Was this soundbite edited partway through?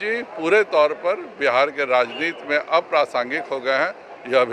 no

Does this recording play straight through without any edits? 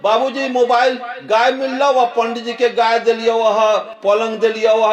yes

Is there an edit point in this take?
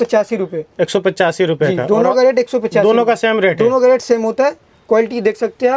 no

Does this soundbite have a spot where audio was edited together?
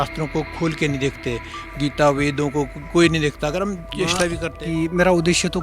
yes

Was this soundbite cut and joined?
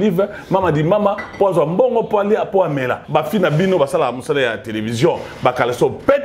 yes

